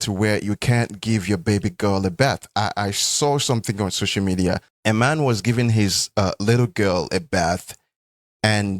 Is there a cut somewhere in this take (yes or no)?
yes